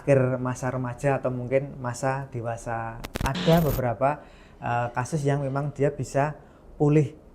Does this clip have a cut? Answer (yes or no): yes